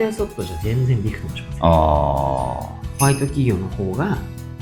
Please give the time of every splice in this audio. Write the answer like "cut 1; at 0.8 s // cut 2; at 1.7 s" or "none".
cut 1; at 2.8 s